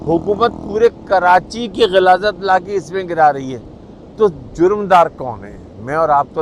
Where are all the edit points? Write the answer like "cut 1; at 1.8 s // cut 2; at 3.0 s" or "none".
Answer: none